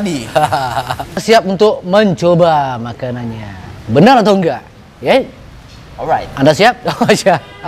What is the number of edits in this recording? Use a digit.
1